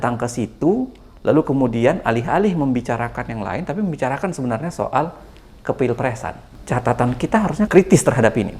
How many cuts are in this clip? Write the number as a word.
two